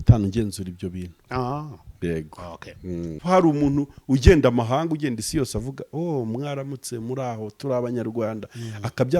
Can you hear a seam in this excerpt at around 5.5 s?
no; 1 cut; at 3.2 s

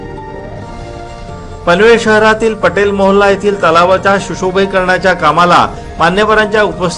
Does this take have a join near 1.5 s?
yes; 1 cut; at 1.5 s

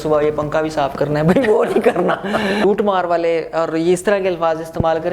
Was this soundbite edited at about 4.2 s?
no; 1 cut; at 2.6 s

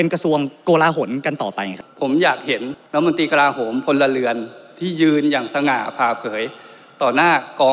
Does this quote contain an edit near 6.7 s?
no; 1 cut; at 1.8 s

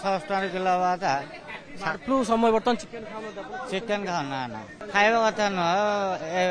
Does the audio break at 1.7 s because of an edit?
no; 1 cut; at 4.8 s

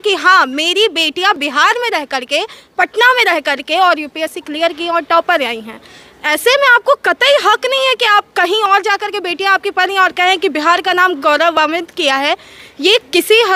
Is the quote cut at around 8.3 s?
no; 0 cuts

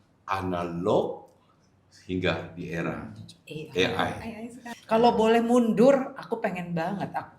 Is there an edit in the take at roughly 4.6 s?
yes; 1 cut; at 4.6 s

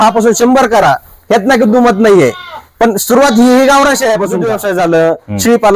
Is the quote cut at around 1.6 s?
no; 1 cut; at 4.5 s

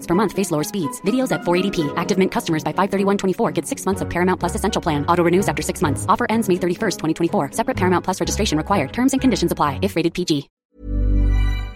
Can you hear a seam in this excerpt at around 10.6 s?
yes; 1 cut; at 10.6 s

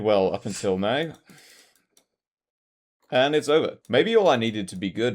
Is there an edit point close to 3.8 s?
yes; 1 cut; at 3.8 s

